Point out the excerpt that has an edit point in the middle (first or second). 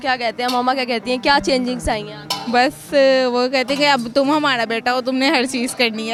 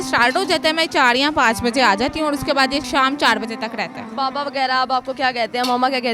second